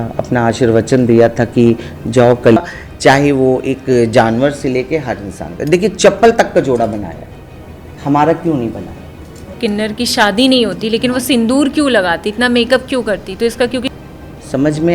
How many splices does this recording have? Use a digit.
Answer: 3